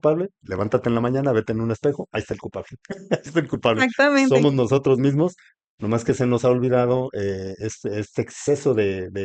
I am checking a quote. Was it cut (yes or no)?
no